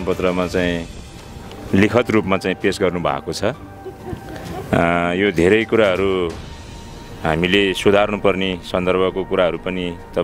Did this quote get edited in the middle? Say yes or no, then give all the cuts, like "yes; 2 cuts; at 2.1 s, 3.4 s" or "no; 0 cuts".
no; 0 cuts